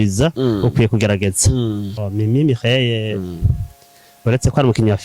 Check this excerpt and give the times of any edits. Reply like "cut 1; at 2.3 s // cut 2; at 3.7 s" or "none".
cut 1; at 2.1 s